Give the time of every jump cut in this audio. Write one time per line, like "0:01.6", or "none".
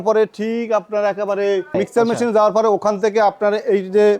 0:01.8